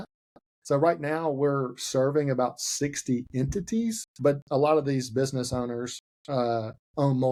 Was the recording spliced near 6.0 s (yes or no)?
no